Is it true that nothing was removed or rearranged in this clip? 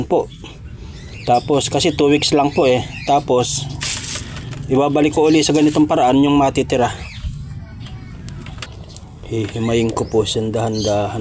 no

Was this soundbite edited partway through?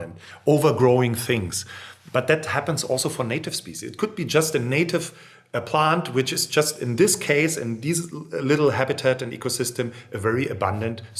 no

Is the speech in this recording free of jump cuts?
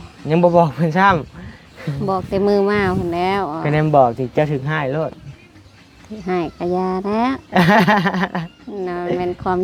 yes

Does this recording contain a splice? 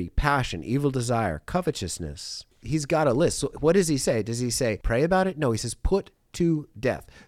yes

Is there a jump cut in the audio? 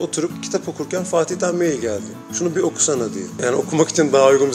no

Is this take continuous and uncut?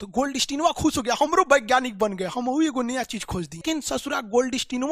no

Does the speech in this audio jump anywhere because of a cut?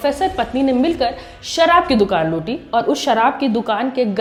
no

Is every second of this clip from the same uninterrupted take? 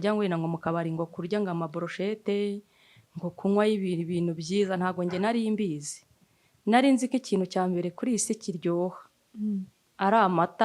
yes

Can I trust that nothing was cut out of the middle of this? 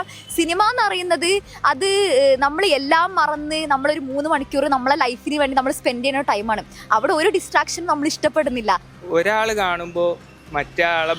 no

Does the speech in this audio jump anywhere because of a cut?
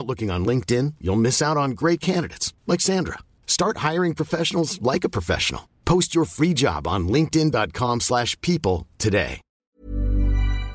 yes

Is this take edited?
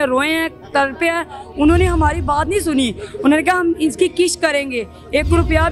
no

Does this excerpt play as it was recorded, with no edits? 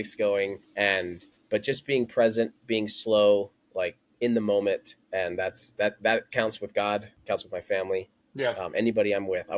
no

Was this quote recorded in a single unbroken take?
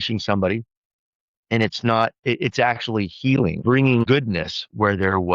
no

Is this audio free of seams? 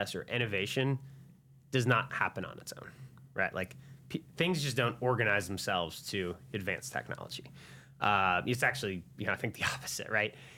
yes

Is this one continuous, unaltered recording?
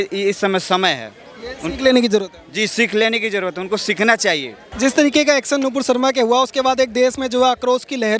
yes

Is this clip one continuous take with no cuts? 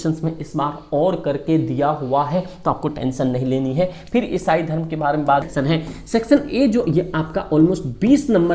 no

